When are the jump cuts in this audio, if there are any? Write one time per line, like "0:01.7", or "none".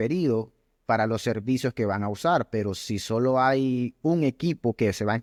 none